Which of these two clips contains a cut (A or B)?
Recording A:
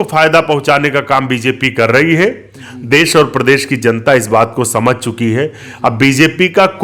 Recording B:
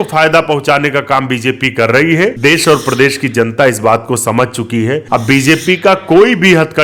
B